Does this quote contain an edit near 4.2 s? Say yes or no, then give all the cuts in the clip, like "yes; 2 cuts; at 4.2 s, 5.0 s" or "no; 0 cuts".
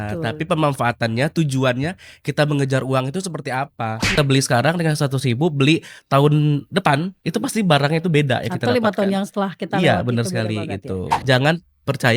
yes; 2 cuts; at 4.2 s, 11.2 s